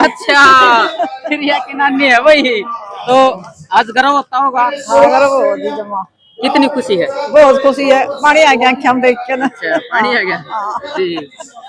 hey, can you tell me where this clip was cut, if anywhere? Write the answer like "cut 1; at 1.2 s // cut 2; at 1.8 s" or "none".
none